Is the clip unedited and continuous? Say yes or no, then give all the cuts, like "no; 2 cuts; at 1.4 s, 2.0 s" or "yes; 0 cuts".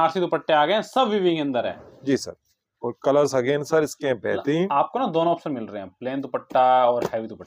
yes; 0 cuts